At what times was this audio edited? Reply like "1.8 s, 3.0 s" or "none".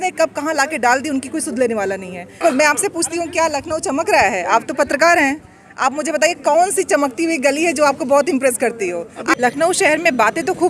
2.4 s, 9.3 s